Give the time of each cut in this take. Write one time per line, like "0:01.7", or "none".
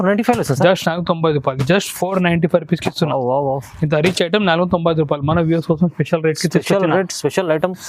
none